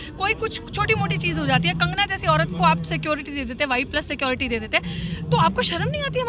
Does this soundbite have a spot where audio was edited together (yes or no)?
no